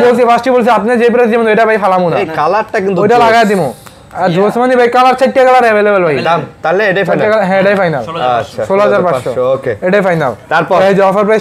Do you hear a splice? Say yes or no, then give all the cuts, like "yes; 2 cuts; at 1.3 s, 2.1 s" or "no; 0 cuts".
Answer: no; 0 cuts